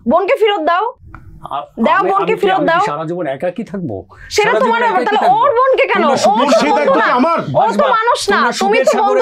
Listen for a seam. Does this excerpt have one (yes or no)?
no